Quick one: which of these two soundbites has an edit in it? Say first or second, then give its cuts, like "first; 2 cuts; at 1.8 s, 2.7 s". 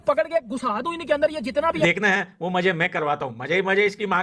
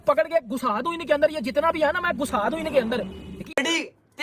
first; 1 cut; at 1.8 s